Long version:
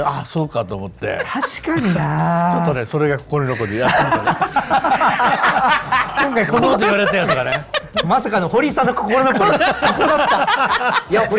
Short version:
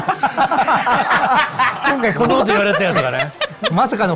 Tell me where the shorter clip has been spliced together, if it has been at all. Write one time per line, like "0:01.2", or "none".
none